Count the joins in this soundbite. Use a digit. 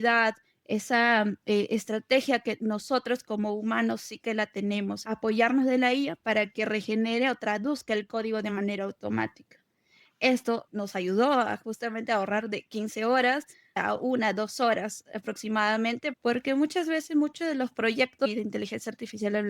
5